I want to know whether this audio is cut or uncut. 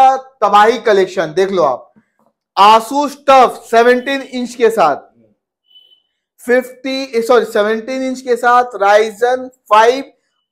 uncut